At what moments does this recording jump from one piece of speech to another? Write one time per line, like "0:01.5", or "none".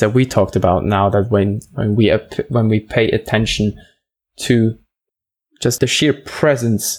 0:05.4